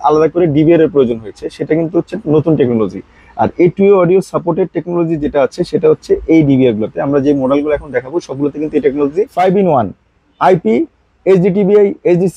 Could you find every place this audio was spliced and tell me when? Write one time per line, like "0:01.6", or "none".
0:09.3